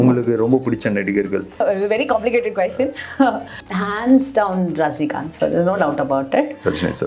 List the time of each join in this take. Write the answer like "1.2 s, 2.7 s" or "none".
1.6 s, 3.6 s